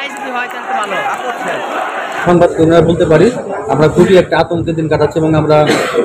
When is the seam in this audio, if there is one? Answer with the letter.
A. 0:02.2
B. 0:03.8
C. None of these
A